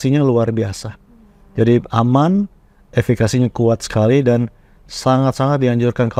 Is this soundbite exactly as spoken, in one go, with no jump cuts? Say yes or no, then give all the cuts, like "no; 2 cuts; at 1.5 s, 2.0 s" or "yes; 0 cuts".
yes; 0 cuts